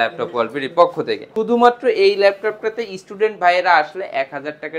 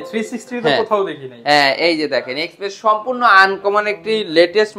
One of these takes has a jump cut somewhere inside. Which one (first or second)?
first